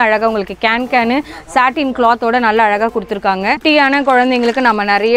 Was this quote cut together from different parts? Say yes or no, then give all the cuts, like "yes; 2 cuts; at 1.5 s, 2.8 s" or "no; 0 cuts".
yes; 1 cut; at 3.6 s